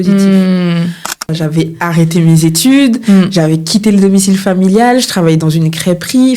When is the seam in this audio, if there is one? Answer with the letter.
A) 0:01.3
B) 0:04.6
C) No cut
A